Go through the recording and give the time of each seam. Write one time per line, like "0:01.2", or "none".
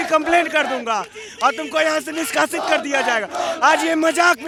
none